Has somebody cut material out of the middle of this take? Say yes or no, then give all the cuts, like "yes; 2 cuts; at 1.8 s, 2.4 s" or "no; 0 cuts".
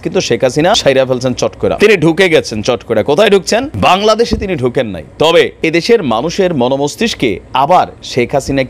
yes; 4 cuts; at 0.8 s, 1.8 s, 3.7 s, 5.5 s